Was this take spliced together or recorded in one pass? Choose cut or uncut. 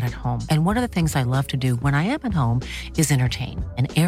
uncut